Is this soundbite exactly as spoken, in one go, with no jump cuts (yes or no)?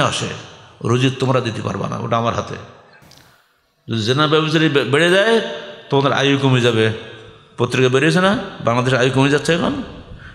yes